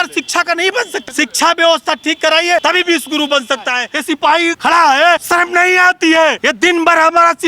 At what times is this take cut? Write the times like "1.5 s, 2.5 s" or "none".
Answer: 1.0 s, 2.6 s, 4.4 s, 5.2 s, 6.4 s